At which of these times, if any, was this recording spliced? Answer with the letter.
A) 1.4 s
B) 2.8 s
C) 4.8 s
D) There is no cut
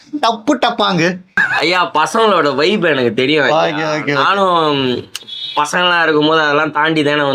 A